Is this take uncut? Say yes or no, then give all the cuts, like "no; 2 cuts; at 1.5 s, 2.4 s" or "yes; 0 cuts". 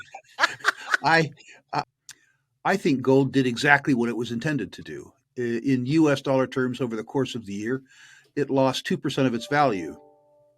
no; 1 cut; at 1.9 s